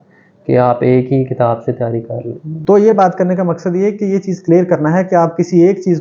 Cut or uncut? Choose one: cut